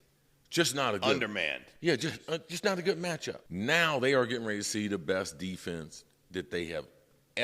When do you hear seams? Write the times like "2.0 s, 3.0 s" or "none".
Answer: 3.4 s

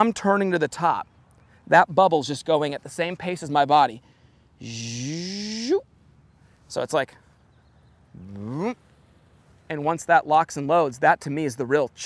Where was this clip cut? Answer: none

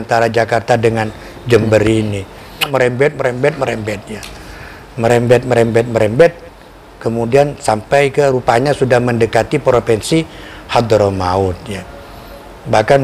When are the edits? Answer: 2.7 s

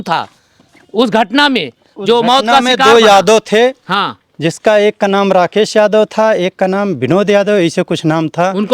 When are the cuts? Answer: none

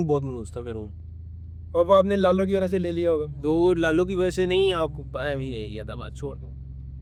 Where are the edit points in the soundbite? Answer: none

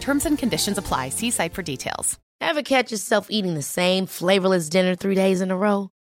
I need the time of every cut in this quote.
none

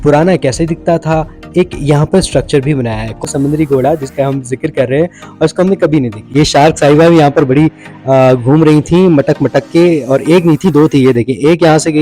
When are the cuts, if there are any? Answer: 3.2 s, 6.3 s

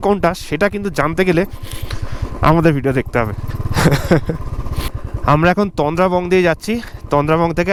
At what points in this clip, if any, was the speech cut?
none

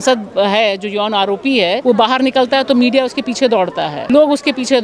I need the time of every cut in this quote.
1.8 s, 4.0 s

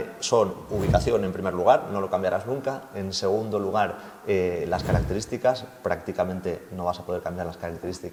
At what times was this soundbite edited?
none

